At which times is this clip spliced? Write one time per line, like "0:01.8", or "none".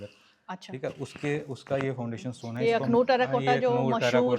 0:02.6